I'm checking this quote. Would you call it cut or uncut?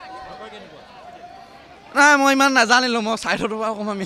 uncut